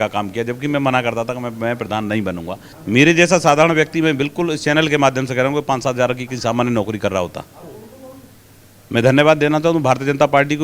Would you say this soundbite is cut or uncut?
cut